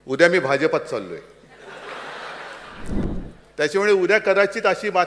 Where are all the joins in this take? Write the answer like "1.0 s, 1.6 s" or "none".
3.0 s